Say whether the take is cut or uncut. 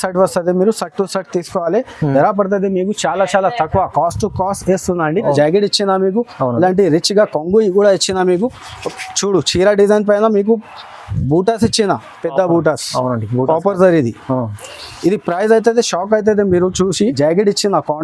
cut